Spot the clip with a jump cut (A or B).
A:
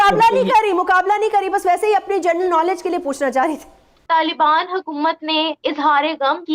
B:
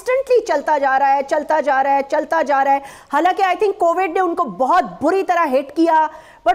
A